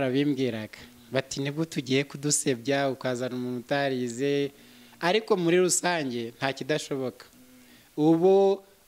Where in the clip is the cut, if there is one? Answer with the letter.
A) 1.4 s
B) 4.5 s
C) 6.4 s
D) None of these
D